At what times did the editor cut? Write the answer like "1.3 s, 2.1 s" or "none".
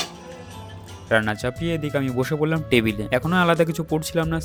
none